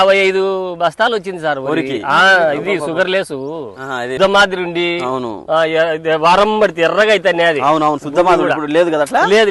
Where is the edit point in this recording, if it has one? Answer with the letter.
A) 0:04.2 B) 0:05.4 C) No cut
A